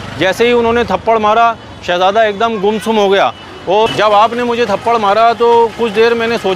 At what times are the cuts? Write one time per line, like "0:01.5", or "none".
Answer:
0:03.9